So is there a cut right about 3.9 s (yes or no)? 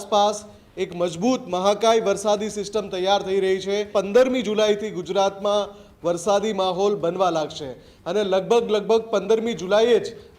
yes